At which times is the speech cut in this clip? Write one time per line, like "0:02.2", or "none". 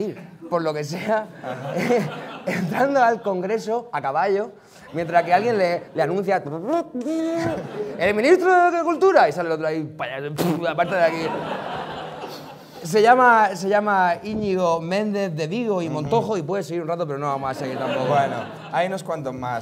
0:14.5